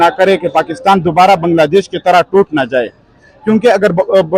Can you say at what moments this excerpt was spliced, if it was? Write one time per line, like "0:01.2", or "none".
none